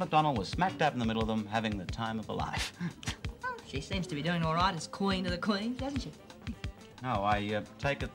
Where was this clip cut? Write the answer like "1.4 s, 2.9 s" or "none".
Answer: 3.2 s, 6.7 s